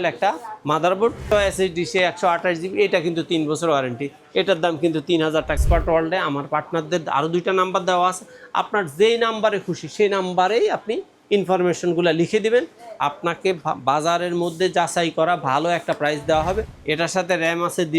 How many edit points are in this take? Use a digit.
3